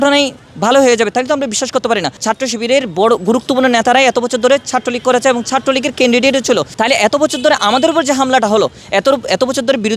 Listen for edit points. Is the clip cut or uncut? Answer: cut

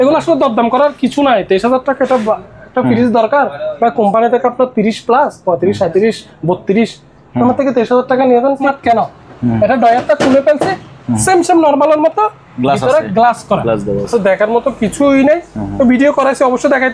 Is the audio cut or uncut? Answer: cut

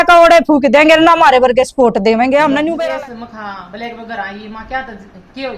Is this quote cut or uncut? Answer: cut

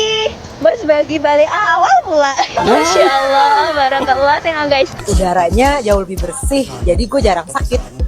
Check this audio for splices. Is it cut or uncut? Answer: cut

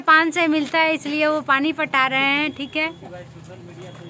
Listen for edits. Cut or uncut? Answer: uncut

